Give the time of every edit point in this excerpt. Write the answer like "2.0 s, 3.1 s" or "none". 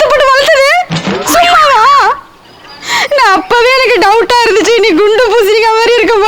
2.9 s